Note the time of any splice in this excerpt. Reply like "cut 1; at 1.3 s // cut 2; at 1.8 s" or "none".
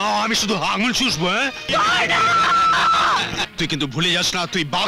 cut 1; at 1.7 s // cut 2; at 3.5 s